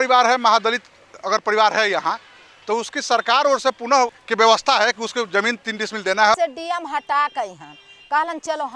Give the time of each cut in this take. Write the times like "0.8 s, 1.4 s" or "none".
4.2 s, 6.4 s